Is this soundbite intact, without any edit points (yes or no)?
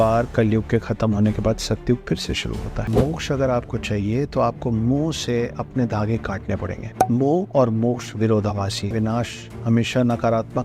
no